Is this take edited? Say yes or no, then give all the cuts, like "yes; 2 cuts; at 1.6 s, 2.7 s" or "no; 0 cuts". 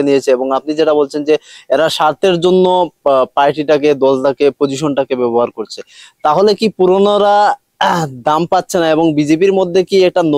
no; 0 cuts